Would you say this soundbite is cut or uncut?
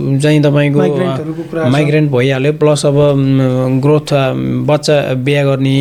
uncut